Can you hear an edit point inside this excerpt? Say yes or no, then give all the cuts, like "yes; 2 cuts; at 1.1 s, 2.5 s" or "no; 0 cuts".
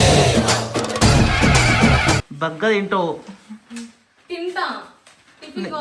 yes; 1 cut; at 2.3 s